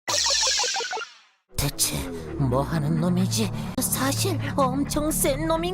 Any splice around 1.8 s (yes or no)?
no